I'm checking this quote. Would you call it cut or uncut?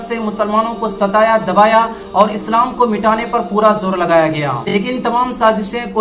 cut